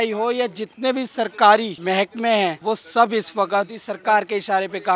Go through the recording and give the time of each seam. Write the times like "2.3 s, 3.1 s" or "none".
1.7 s, 2.6 s, 3.8 s